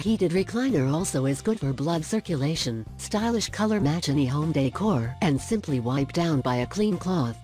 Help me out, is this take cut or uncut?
cut